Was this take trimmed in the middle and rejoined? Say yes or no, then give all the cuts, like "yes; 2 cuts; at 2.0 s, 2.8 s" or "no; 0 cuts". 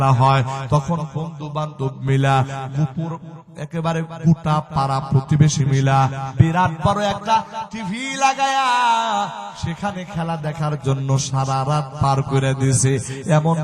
yes; 1 cut; at 6.2 s